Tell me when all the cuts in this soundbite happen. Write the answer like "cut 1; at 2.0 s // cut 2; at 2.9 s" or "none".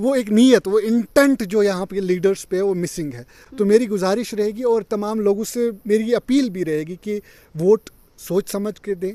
none